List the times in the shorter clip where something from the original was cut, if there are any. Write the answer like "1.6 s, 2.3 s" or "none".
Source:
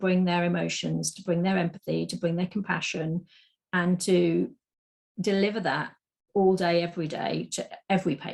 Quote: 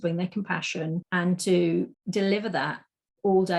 1.1 s, 2.0 s